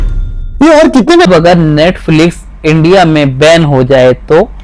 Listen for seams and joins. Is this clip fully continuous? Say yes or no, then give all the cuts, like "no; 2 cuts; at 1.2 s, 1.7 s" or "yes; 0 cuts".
no; 1 cut; at 1.3 s